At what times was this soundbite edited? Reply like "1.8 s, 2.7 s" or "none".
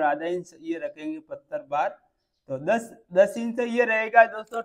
none